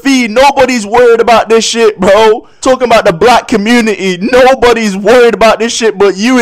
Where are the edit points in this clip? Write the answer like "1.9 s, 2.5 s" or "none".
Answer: 2.5 s